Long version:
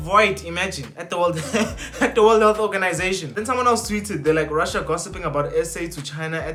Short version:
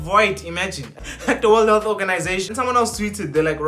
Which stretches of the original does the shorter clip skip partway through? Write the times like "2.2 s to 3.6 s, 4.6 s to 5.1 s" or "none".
1.0 s to 1.8 s, 3.2 s to 3.4 s